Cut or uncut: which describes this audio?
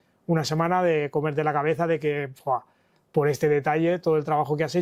uncut